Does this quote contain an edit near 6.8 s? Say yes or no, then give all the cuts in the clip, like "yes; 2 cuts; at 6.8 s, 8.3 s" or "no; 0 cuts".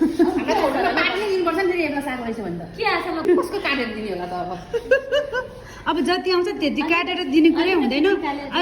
no; 1 cut; at 3.2 s